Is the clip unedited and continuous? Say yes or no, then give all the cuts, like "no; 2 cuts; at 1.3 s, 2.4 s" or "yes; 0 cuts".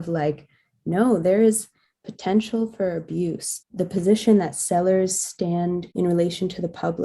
yes; 0 cuts